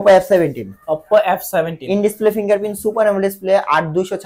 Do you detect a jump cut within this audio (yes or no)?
no